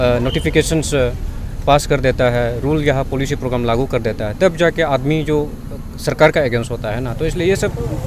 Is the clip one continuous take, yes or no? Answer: yes